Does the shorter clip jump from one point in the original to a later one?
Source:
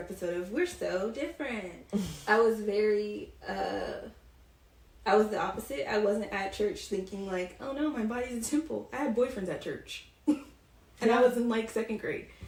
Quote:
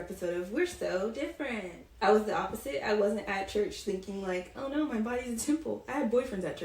yes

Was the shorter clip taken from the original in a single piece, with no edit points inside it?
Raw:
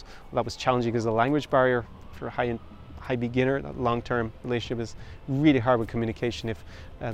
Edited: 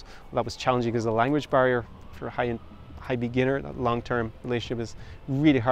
yes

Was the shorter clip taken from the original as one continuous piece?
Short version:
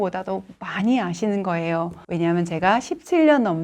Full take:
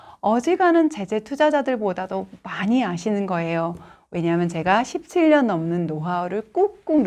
no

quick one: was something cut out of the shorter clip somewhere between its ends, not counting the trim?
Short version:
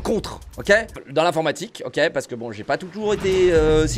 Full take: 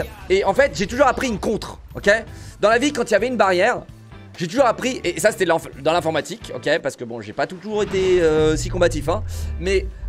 yes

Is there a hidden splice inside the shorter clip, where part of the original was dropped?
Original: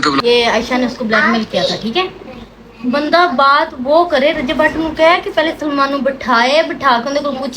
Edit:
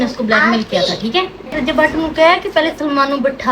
yes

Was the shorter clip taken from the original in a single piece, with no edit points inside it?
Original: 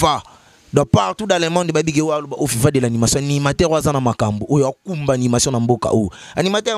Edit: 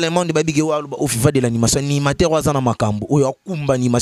yes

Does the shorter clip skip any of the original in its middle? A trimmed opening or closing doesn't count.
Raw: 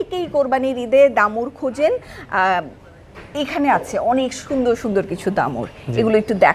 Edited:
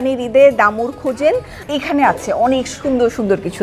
yes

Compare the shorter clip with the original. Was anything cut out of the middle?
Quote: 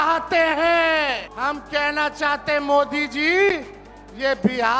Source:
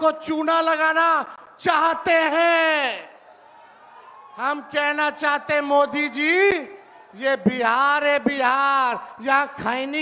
yes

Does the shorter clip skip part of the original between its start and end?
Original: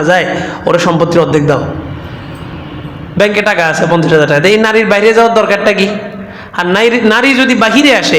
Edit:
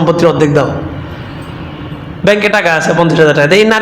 no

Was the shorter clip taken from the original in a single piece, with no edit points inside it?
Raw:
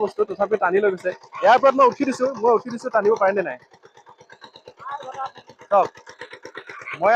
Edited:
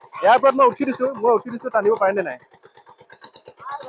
yes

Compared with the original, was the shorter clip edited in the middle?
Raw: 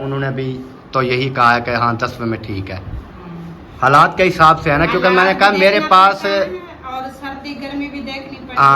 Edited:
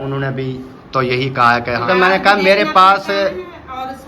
yes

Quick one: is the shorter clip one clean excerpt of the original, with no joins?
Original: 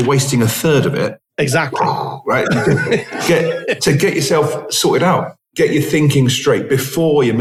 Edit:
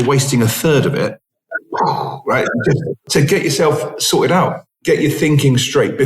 no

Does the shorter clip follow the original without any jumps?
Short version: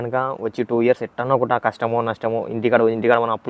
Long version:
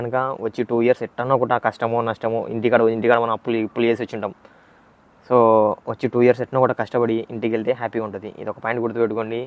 yes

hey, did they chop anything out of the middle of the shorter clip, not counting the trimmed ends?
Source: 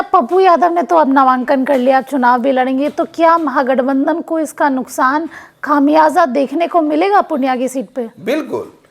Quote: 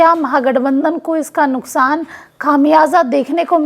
no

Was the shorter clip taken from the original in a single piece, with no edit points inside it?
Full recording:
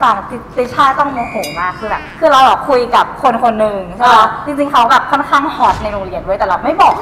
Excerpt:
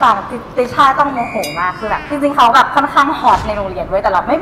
no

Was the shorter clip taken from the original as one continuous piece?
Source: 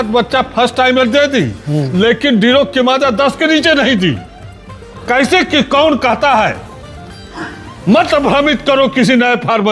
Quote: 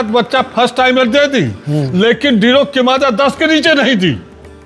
yes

